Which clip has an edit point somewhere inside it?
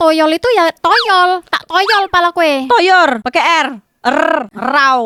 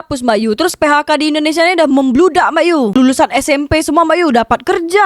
second; 1 cut; at 2.9 s

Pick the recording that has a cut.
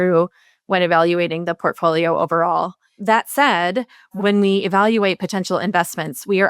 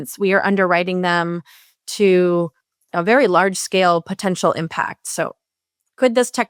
first; 2 cuts; at 2.8 s, 4.1 s

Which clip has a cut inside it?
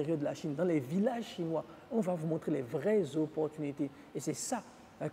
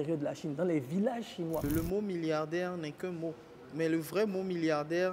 second; 1 cut; at 1.6 s

